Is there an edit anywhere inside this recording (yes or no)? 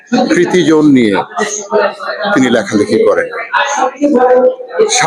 no